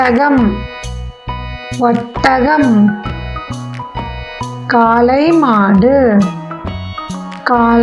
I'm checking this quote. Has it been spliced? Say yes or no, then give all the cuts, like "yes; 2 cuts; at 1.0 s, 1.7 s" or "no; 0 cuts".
no; 0 cuts